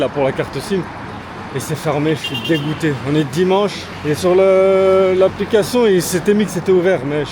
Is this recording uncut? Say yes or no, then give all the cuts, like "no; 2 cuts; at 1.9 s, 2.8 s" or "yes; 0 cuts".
yes; 0 cuts